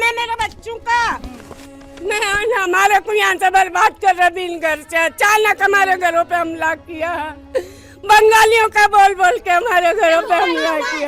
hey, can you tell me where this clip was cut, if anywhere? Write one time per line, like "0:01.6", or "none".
none